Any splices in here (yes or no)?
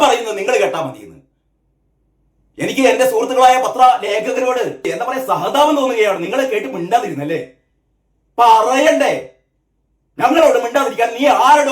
yes